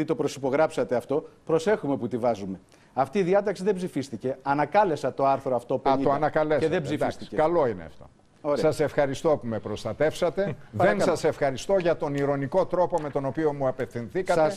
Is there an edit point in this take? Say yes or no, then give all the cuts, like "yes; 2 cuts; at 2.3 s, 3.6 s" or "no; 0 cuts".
yes; 1 cut; at 1.3 s